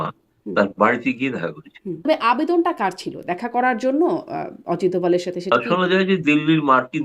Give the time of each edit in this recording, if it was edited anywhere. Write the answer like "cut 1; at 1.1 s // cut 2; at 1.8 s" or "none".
cut 1; at 2.0 s // cut 2; at 5.5 s